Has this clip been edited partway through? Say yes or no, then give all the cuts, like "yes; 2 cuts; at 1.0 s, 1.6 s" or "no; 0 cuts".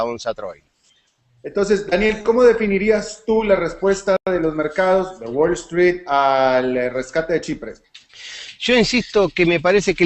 no; 0 cuts